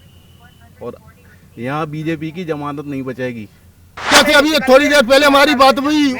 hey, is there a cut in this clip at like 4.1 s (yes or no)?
yes